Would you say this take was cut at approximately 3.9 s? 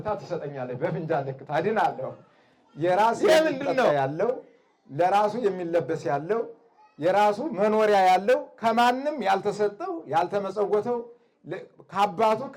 yes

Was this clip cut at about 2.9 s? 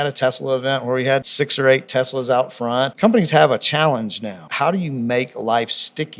yes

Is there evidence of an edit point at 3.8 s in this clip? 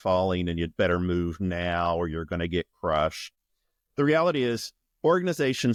no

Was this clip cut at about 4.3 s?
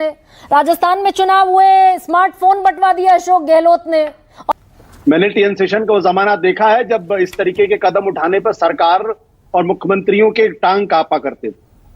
yes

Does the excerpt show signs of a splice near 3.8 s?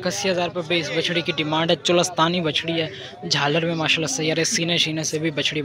no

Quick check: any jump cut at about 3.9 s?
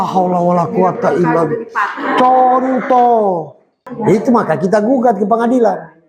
yes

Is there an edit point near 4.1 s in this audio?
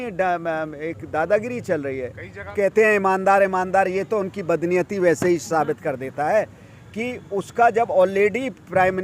no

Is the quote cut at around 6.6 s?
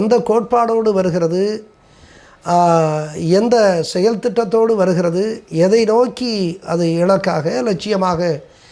no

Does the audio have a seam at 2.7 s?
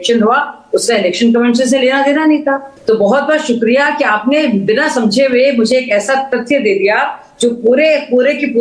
yes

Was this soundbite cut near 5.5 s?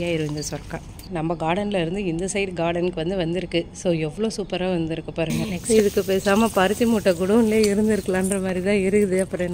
yes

